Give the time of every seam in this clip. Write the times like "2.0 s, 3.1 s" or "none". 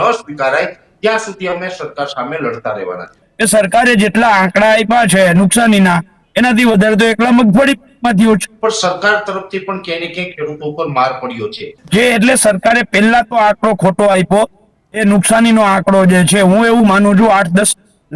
3.2 s, 8.5 s, 11.8 s

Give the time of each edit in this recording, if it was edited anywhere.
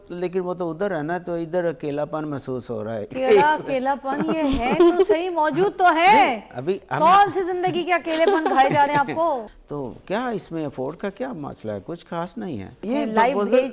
9.5 s, 12.8 s

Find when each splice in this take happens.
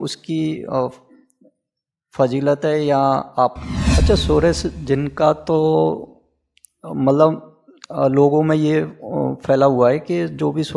3.6 s

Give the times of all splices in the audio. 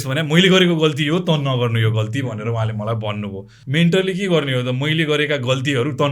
3.5 s

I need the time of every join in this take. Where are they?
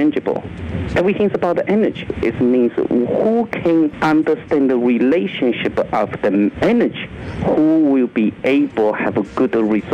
2.1 s, 4.0 s, 6.5 s

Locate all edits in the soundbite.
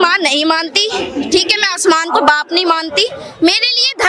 none

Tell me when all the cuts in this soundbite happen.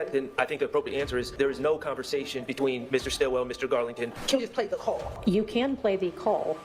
1.3 s, 4.2 s, 5.1 s

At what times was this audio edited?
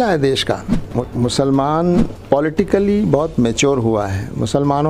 1.0 s, 2.2 s

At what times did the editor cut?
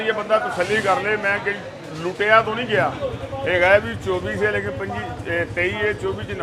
3.0 s

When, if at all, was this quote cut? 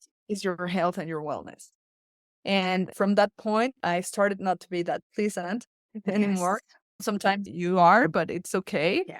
2.9 s, 3.8 s, 7.1 s

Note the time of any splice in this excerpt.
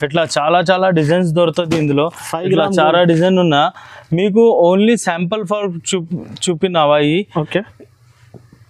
none

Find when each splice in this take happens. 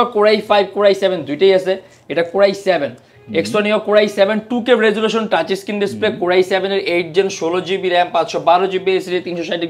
none

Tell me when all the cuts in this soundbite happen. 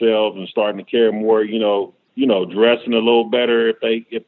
2.0 s

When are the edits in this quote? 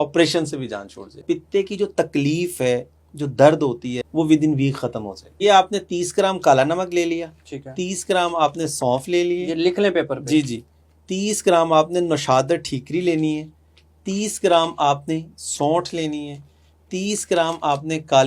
1.2 s, 3.9 s, 5.2 s

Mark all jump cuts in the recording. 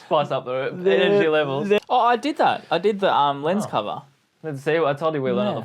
1.8 s

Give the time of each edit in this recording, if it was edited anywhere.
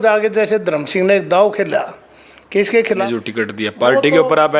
3.0 s

